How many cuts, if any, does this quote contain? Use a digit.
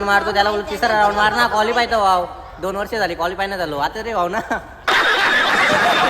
1